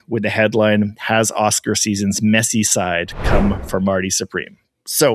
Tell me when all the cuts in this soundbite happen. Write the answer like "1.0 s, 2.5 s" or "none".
none

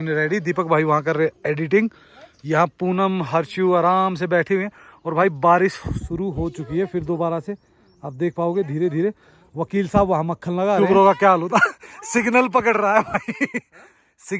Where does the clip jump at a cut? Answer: 10.8 s

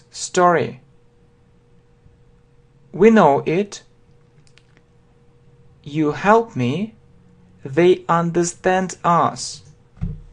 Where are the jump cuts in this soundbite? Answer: 3.5 s

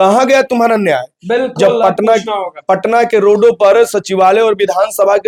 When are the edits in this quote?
none

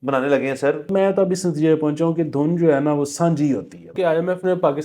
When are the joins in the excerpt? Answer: 0.9 s, 3.9 s

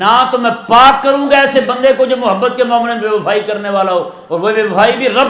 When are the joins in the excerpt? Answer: none

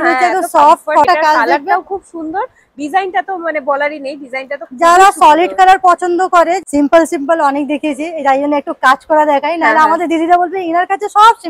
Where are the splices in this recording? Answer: 1.0 s, 6.6 s

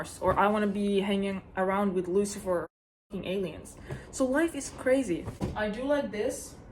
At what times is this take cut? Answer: 5.4 s

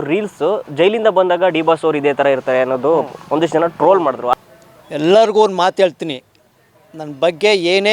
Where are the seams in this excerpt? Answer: 4.4 s

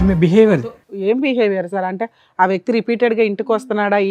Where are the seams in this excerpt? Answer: none

